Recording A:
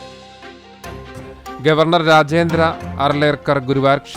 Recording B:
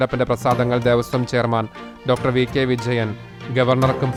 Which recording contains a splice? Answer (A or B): A